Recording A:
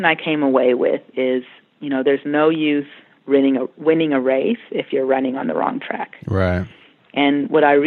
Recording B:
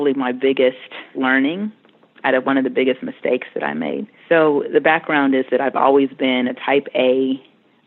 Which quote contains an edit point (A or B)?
B